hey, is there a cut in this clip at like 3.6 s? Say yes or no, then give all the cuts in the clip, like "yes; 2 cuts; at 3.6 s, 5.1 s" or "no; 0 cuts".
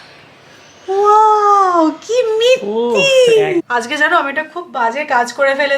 yes; 1 cut; at 3.6 s